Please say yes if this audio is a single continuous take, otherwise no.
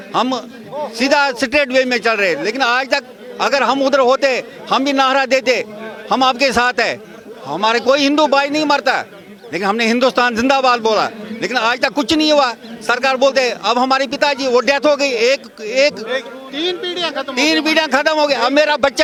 yes